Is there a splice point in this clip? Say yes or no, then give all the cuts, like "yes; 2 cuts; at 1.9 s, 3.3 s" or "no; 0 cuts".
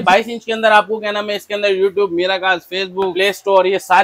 yes; 1 cut; at 3.1 s